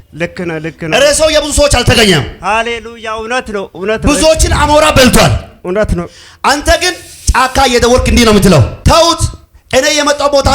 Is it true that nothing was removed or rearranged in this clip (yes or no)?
no